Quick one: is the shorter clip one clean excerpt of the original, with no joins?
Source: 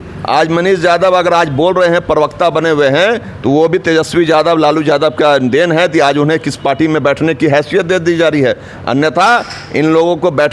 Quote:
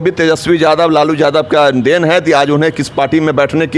yes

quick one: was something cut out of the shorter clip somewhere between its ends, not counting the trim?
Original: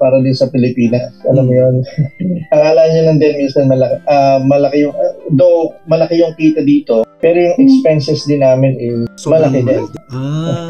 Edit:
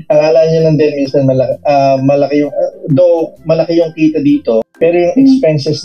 no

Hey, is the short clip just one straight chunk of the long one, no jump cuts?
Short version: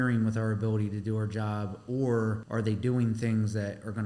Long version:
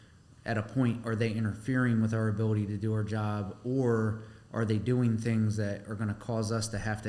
no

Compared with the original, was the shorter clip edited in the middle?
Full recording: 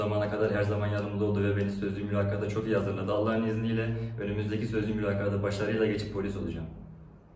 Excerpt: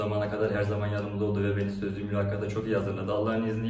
no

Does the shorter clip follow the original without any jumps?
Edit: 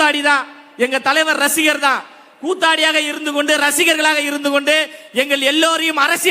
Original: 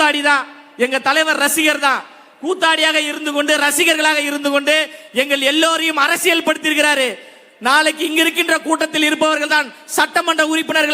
yes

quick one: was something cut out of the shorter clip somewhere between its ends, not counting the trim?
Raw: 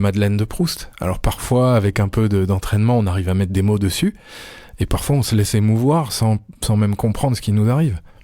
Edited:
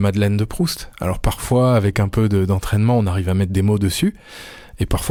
no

